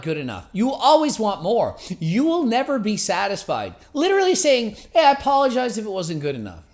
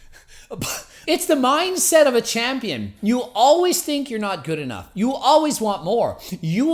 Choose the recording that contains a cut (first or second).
second